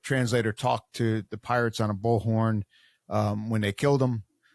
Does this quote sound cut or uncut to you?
uncut